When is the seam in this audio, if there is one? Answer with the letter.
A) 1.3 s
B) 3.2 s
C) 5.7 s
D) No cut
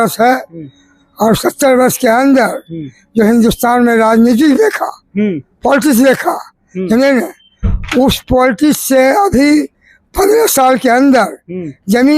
D